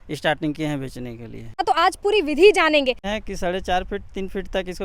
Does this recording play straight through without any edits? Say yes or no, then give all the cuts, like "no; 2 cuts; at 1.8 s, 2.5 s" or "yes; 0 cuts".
no; 2 cuts; at 1.6 s, 3.1 s